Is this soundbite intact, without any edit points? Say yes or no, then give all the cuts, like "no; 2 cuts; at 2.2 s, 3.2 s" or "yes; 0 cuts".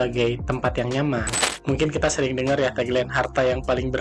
no; 1 cut; at 1.5 s